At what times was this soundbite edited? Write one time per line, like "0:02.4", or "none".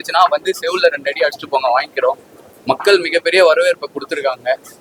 none